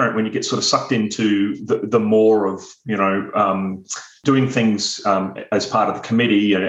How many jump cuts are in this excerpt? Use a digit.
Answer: 1